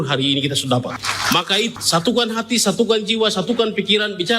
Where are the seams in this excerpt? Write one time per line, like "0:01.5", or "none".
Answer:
0:01.5